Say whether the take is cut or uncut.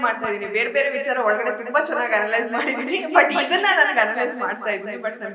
uncut